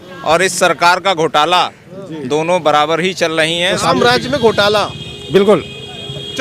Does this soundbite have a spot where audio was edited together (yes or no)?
yes